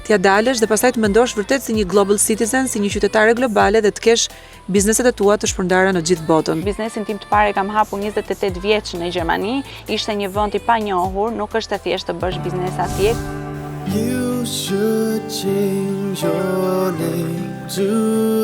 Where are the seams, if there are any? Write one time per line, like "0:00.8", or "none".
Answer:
0:06.6
0:13.2